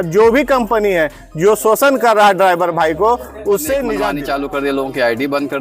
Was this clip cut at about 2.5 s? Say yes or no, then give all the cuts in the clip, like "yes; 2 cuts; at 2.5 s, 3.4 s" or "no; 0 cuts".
no; 1 cut; at 4.1 s